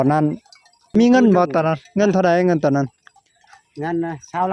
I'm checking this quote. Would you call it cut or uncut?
cut